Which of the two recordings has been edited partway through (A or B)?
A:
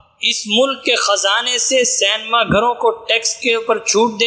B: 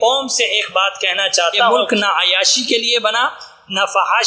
B